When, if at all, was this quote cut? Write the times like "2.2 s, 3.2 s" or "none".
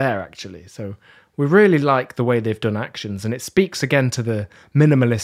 none